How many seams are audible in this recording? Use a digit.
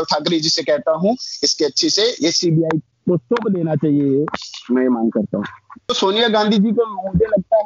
1